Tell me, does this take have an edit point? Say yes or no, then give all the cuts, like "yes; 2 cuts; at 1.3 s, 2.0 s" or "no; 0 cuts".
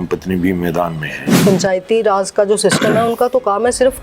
yes; 1 cut; at 1.4 s